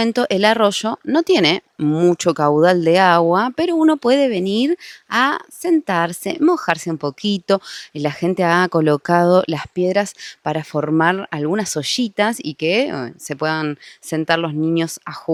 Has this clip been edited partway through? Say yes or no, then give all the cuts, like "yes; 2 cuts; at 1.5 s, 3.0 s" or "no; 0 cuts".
no; 0 cuts